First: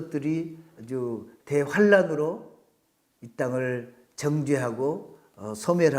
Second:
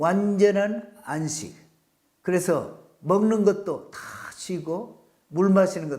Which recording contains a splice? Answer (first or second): first